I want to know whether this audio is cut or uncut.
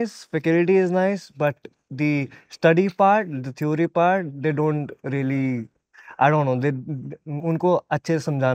uncut